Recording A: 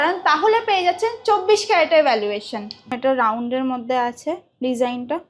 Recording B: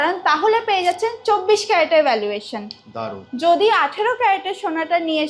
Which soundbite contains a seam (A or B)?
A